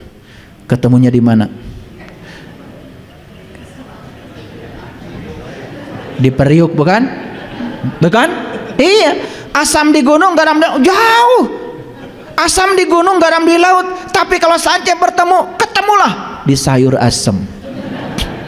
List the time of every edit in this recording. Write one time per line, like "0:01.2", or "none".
none

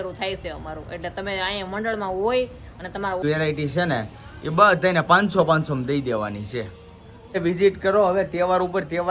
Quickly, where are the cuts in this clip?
0:03.2
0:07.4

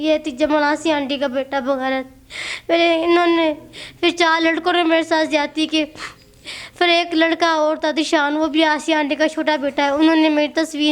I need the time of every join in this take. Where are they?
none

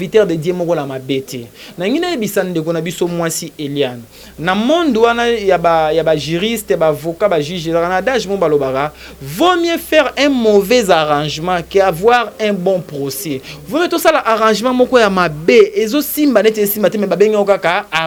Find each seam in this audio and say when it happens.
none

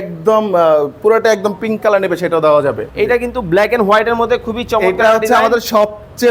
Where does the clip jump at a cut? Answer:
0:02.8

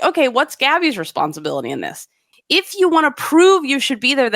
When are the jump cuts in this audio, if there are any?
0:02.3

